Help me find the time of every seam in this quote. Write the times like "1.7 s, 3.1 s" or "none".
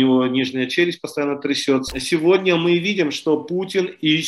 1.9 s